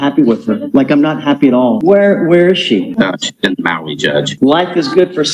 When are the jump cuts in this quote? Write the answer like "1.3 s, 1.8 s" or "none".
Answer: 1.8 s, 4.3 s